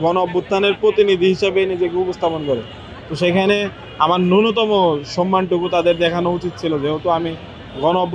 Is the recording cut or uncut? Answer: uncut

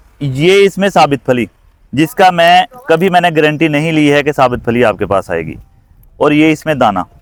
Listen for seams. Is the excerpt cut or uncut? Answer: uncut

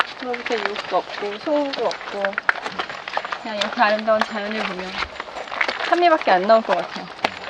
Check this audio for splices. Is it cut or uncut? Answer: uncut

